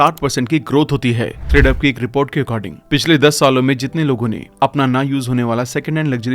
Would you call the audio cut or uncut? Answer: cut